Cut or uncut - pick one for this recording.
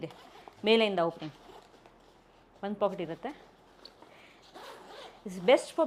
uncut